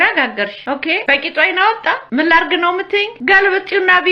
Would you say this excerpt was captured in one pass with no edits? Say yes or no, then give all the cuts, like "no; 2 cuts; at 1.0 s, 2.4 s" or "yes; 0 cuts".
no; 3 cuts; at 0.9 s, 2.0 s, 3.1 s